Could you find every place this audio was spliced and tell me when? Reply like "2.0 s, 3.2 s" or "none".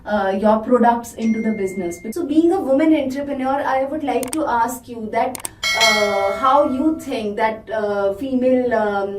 2.0 s

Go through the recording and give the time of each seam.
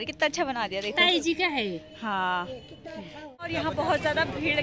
3.5 s

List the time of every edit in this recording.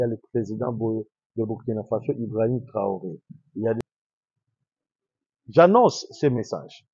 3.8 s

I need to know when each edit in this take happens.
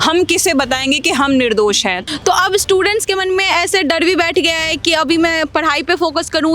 2.0 s

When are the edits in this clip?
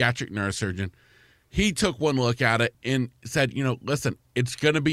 2.7 s

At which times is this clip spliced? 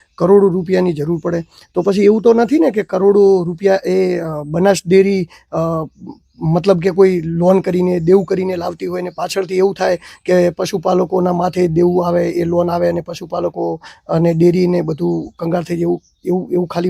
none

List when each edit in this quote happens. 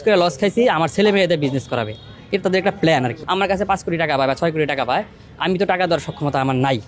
none

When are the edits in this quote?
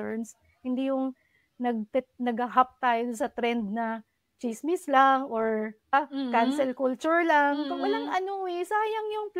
5.9 s

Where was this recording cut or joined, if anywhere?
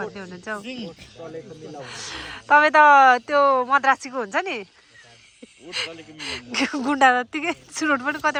none

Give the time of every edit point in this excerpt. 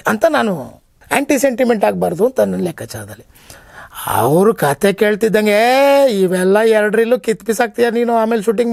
0.9 s

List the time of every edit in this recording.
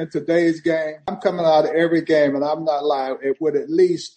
1.2 s

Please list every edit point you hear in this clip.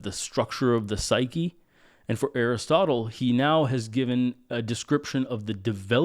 none

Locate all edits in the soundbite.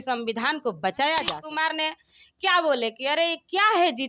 1.4 s

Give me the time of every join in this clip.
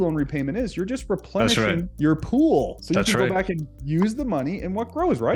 none

